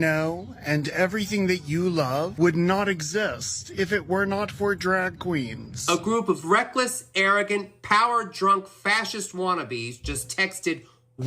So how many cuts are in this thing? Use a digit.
2